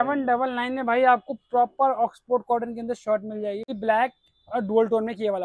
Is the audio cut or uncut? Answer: cut